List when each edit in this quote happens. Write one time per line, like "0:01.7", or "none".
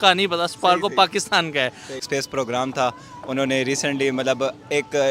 0:02.0